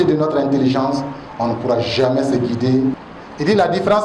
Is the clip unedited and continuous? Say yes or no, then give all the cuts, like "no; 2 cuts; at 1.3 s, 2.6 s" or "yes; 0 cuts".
no; 1 cut; at 3.0 s